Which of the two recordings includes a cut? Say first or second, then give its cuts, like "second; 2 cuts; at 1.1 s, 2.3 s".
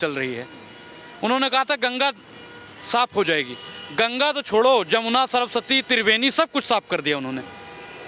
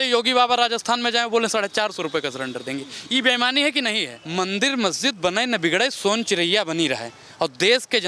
second; 1 cut; at 4.1 s